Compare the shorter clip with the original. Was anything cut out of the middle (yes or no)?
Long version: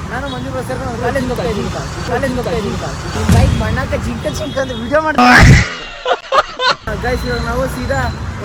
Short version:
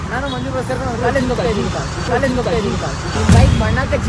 no